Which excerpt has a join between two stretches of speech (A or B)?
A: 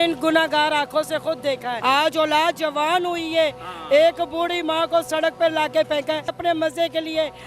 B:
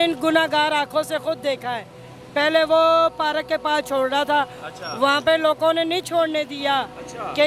A